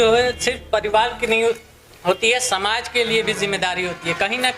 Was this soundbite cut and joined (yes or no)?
no